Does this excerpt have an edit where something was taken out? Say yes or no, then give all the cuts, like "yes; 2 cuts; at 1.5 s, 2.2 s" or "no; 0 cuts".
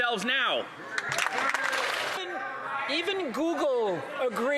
yes; 1 cut; at 2.2 s